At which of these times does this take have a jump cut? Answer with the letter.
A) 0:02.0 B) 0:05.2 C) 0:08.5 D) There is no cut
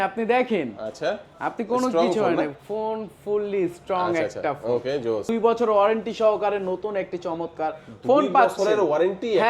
B